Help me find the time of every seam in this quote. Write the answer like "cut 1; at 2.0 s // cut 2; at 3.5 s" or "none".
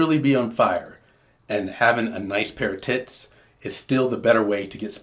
none